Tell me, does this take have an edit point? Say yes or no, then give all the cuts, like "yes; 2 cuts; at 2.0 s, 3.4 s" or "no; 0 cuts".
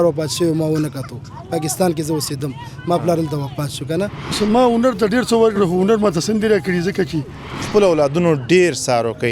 yes; 2 cuts; at 4.4 s, 7.7 s